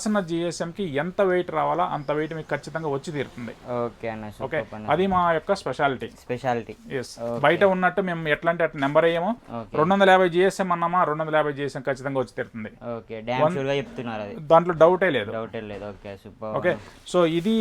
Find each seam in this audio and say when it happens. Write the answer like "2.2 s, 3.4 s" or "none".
none